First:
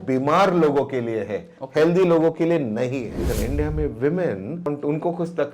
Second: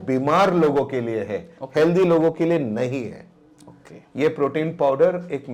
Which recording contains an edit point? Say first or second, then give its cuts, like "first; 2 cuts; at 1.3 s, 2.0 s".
first; 2 cuts; at 3.3 s, 4.7 s